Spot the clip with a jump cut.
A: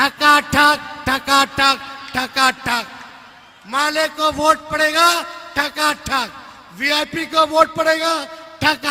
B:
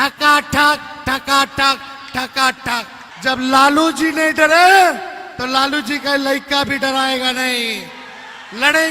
B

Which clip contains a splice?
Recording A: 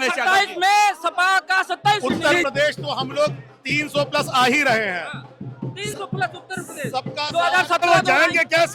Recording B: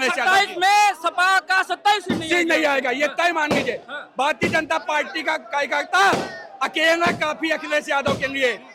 A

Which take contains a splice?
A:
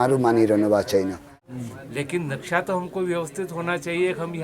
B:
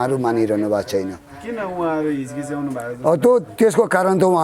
A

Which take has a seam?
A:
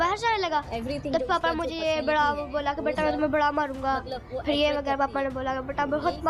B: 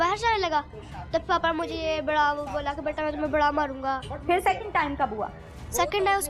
B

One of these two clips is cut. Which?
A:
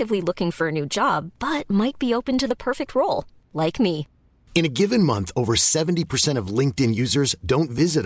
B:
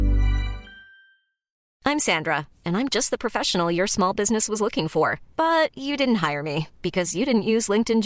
B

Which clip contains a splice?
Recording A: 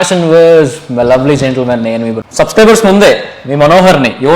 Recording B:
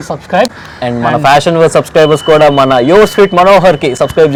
A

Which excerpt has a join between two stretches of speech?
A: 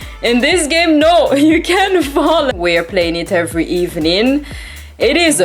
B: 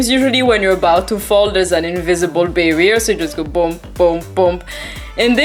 A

